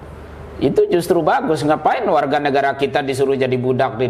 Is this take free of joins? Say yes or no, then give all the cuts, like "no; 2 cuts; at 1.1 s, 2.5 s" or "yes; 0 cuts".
yes; 0 cuts